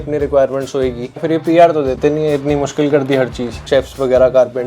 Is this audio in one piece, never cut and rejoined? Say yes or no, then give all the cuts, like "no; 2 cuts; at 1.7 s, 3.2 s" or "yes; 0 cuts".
no; 2 cuts; at 1.2 s, 3.6 s